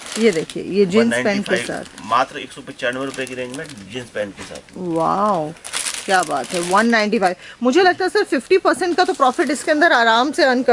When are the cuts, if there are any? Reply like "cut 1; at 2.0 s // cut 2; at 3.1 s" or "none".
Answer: none